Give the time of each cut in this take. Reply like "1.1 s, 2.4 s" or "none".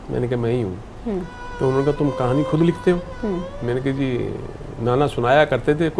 none

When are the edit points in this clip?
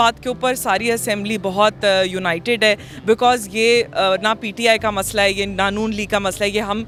none

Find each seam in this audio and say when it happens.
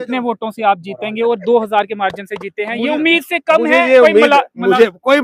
none

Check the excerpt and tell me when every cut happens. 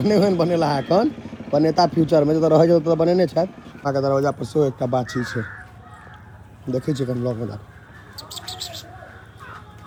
none

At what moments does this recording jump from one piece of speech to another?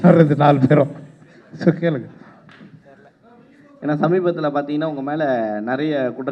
none

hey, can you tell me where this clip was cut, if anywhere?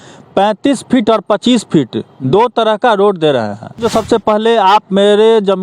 3.8 s

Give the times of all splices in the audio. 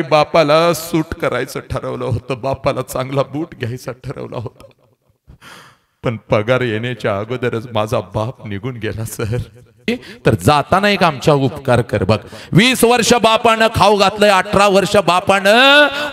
9.9 s

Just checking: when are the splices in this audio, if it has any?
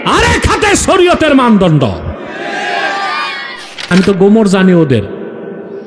3.9 s

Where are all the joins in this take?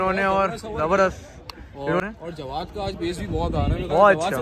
2.0 s

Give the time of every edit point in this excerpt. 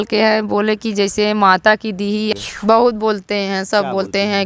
2.3 s

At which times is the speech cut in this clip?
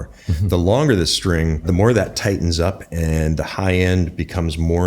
1.6 s

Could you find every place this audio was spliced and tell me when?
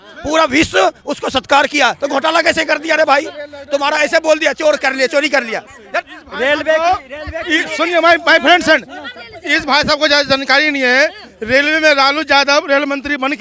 none

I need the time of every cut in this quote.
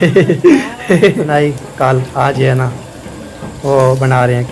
1.3 s

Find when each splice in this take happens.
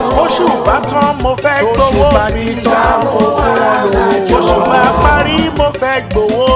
none

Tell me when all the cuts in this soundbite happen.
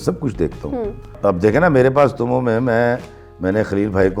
1.1 s

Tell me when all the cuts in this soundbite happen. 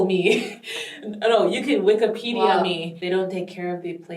2.9 s

